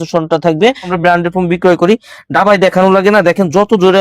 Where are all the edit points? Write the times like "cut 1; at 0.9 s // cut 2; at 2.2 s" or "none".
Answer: cut 1; at 0.9 s